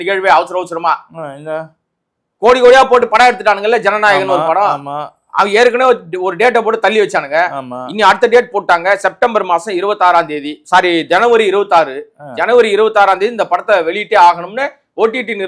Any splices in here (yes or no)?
no